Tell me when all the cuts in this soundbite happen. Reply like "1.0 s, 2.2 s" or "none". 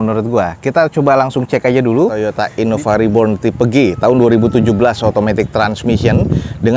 2.2 s